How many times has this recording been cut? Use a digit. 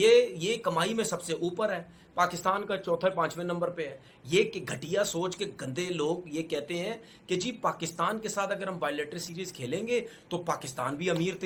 0